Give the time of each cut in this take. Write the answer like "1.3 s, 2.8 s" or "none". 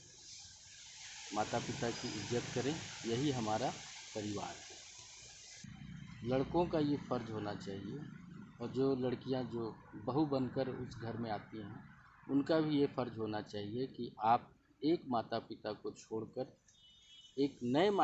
5.7 s